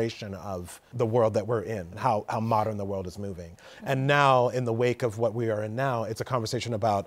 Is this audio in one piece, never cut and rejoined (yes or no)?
no